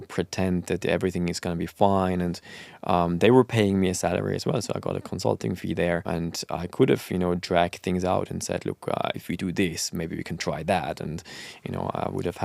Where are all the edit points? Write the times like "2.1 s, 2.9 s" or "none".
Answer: 6.0 s